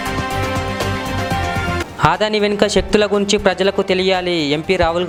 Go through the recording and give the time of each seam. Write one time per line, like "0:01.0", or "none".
none